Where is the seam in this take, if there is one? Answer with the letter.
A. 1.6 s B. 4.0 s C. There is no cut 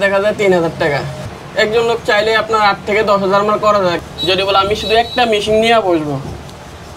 B